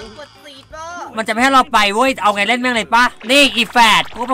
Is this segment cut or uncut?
cut